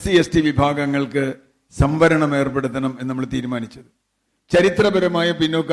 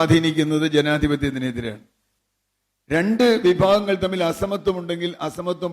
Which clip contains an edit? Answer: second; 1 cut; at 2.1 s

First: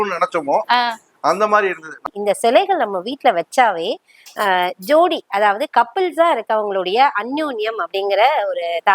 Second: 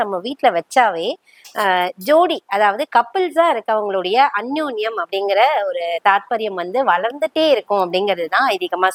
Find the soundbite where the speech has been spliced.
first; 1 cut; at 1.9 s

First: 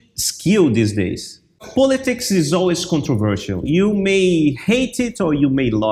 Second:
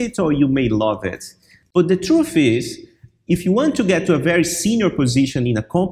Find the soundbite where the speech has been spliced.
first; 1 cut; at 1.6 s

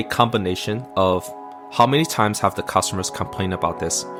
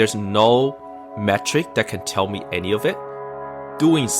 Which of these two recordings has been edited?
second; 1 cut; at 3.3 s

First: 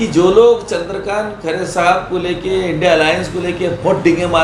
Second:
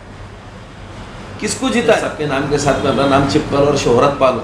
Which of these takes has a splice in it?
second; 1 cut; at 2.2 s

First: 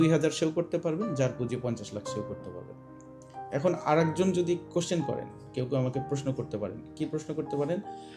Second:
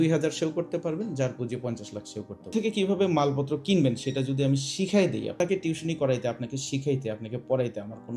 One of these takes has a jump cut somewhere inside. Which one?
second; 2 cuts; at 2.5 s, 5.3 s

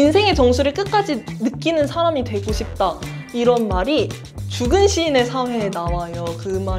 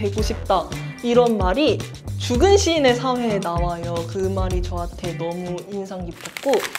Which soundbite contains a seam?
first; 1 cut; at 1.3 s

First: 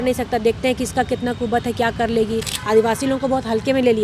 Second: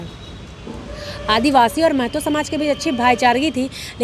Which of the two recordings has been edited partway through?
first; 1 cut; at 2.5 s

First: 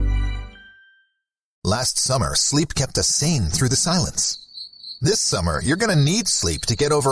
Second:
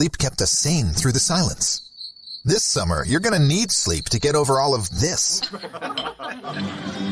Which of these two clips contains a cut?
first; 1 cut; at 1.5 s

